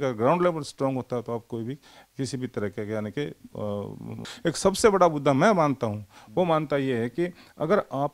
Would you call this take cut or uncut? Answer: cut